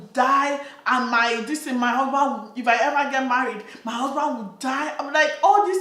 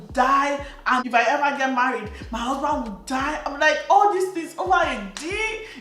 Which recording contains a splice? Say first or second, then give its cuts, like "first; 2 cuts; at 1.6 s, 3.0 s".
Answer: second; 1 cut; at 1.0 s